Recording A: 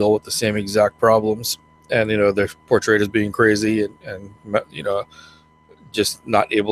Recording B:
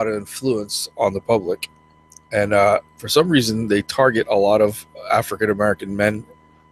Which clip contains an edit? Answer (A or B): B